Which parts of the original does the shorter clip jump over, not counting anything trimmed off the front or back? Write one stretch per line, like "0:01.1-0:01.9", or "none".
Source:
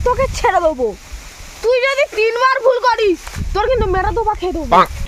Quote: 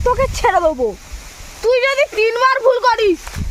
none